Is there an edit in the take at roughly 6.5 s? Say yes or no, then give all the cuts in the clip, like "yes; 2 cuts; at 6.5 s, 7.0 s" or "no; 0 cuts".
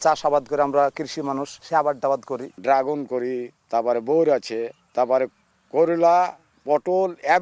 yes; 5 cuts; at 1.5 s, 2.4 s, 3.5 s, 4.8 s, 6.5 s